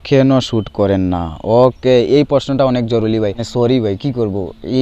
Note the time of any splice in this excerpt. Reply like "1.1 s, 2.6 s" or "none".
3.4 s